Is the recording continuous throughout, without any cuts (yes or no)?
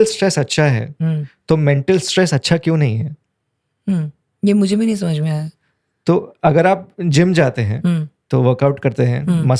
yes